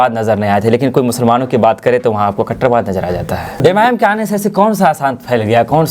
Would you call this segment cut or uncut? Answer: cut